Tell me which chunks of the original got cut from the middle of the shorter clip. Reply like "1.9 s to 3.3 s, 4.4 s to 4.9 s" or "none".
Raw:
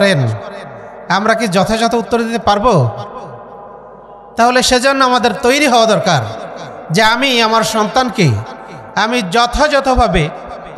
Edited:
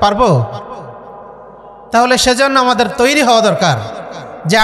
none